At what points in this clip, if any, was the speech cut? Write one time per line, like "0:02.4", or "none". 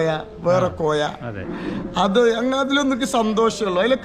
none